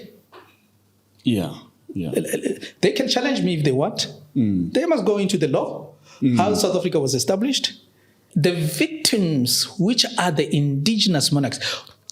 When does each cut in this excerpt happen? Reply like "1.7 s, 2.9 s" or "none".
8.2 s

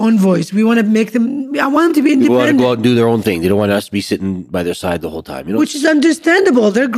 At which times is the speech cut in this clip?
none

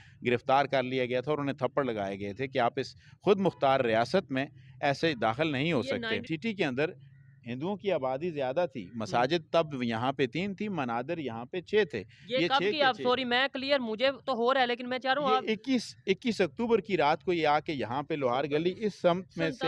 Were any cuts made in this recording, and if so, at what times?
6.2 s

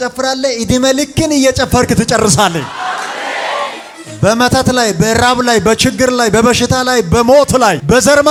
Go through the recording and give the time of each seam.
none

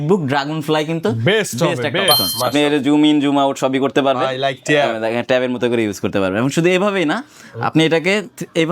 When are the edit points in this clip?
2.2 s

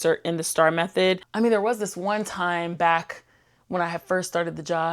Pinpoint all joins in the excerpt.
1.3 s

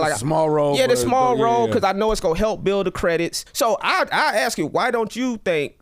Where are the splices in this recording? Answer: 3.4 s

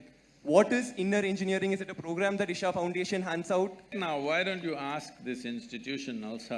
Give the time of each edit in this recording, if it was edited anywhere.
3.9 s

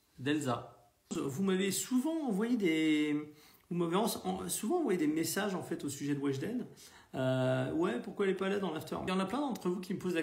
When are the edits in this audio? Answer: 1.2 s, 9.0 s

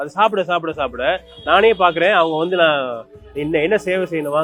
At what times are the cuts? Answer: none

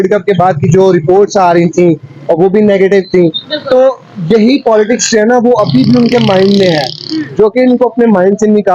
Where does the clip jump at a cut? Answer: none

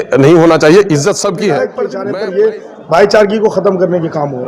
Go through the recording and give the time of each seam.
1.9 s

